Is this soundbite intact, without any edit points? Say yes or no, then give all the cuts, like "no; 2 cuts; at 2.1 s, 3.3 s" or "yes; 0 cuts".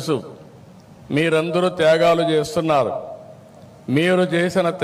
yes; 0 cuts